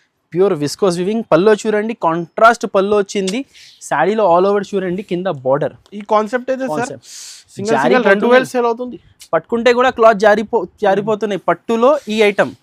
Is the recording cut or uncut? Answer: uncut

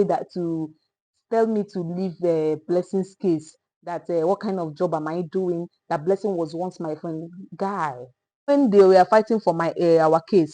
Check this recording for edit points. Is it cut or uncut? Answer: cut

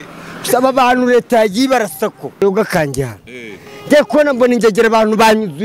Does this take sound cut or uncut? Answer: cut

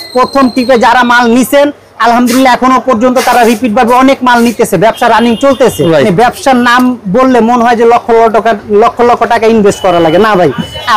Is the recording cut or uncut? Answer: cut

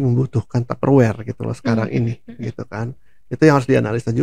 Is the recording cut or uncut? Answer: uncut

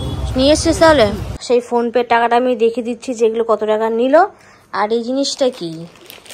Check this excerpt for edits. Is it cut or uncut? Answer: cut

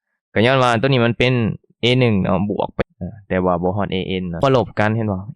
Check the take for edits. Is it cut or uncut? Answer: cut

